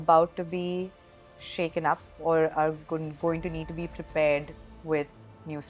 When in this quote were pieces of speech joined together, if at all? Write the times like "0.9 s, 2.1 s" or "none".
none